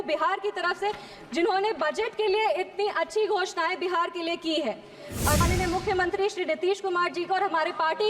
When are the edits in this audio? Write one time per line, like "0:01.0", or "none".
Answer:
0:05.4